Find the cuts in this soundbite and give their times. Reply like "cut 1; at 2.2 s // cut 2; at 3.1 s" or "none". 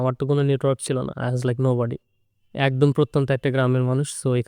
none